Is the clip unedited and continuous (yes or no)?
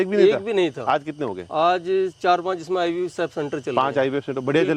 yes